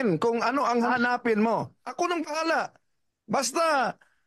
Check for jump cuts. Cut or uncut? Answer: cut